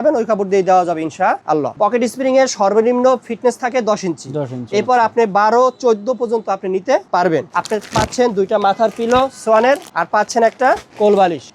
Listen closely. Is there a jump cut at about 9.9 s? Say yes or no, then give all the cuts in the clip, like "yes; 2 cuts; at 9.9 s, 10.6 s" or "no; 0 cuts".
yes; 3 cuts; at 1.7 s, 7.5 s, 9.9 s